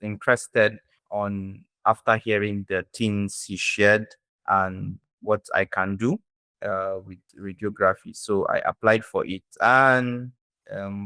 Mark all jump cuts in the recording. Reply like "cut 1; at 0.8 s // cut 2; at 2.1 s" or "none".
none